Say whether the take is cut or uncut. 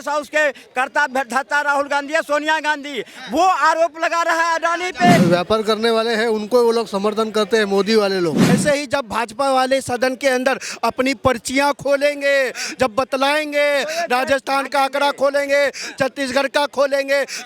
cut